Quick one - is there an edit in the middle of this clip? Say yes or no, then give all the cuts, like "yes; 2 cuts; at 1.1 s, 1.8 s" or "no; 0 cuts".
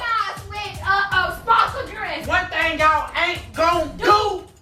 yes; 1 cut; at 2.1 s